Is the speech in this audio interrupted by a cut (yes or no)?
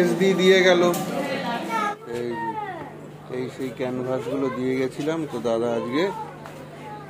yes